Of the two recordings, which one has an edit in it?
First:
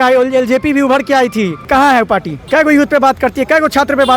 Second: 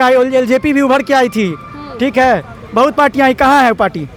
first; 2 cuts; at 1.7 s, 2.3 s

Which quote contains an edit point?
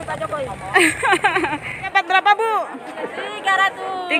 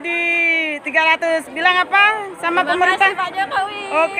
first; 1 cut; at 1.9 s

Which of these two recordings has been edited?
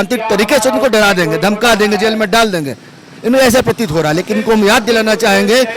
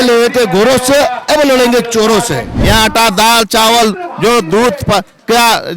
second; 1 cut; at 2.5 s

